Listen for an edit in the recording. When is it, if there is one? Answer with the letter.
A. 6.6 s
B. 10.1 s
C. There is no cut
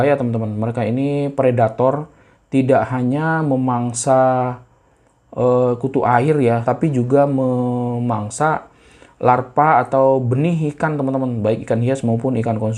A